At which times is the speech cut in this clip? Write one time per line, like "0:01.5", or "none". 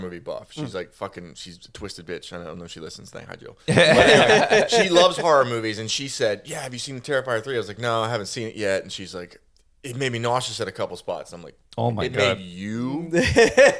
none